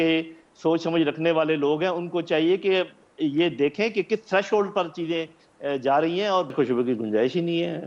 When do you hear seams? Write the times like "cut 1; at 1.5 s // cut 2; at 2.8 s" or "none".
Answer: cut 1; at 6.5 s